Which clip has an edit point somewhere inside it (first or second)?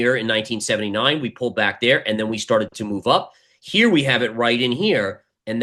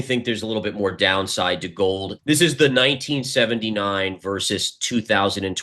second